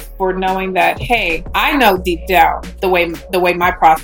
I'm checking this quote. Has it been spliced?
yes; 2 cuts; at 1.4 s, 2.7 s

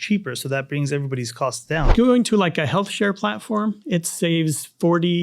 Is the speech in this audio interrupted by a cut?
yes; 1 cut; at 1.9 s

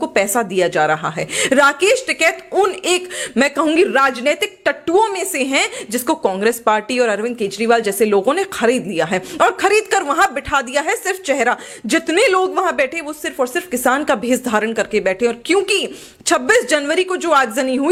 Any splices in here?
no; 0 cuts

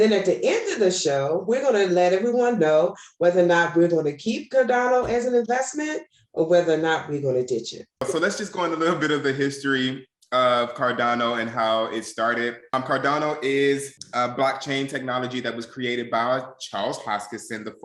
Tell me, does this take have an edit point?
yes; 3 cuts; at 8.0 s, 12.6 s, 14.0 s

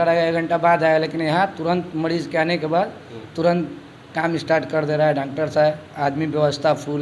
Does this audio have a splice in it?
no; 0 cuts

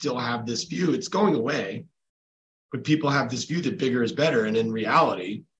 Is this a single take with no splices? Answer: yes; 0 cuts

